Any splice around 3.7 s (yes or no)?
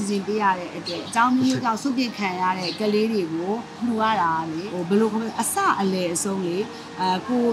yes